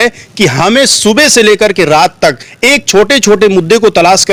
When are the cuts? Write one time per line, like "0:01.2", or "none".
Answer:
none

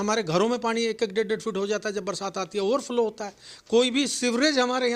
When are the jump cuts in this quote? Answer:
none

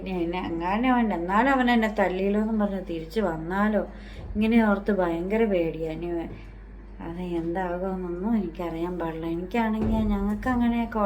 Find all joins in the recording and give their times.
none

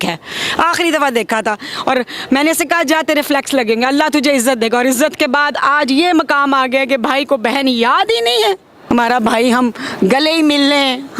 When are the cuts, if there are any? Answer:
0:08.7

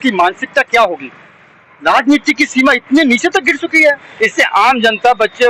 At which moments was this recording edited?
0:04.1

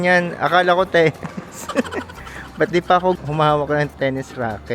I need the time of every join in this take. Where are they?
none

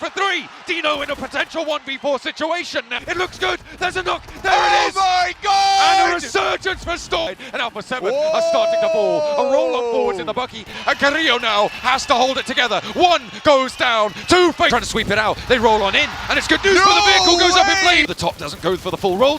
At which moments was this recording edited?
0:02.9
0:07.3
0:10.7
0:14.7
0:18.1

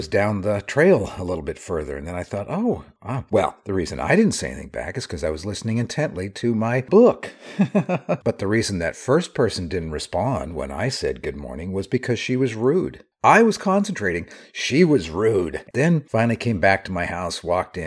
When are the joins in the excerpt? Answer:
0:08.2
0:15.6

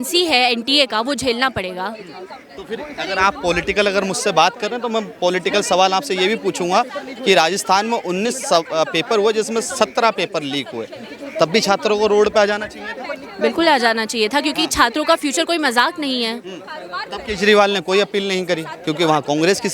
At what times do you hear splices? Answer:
none

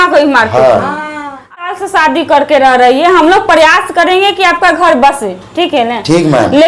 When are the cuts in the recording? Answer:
0:01.7

